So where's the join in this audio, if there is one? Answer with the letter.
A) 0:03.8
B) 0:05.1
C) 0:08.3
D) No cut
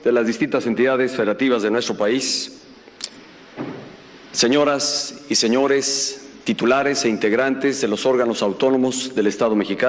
C